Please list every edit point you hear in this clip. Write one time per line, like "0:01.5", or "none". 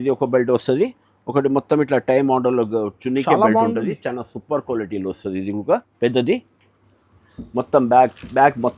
0:05.9